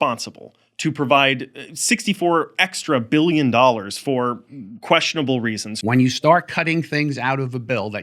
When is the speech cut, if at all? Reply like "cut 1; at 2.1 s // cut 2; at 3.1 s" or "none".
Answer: cut 1; at 5.7 s

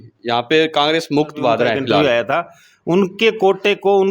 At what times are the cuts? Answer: cut 1; at 2.0 s

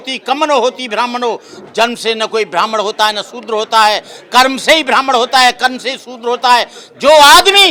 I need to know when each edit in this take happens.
none

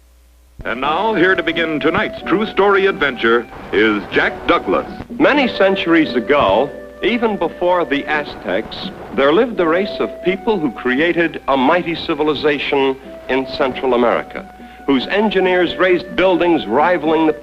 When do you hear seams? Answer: cut 1; at 16.5 s

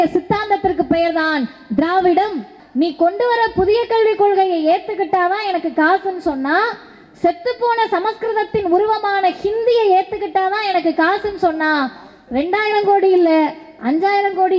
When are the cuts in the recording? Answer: cut 1; at 2.6 s

